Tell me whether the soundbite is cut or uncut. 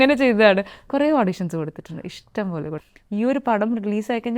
cut